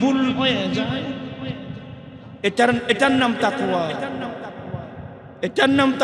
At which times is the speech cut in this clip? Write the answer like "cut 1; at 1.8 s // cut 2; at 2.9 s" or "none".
none